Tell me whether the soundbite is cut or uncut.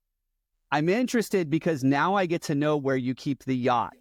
uncut